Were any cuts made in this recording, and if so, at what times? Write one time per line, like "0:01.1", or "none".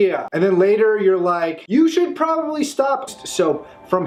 none